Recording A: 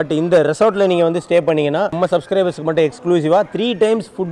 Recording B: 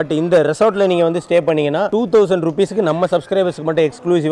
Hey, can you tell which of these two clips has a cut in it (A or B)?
A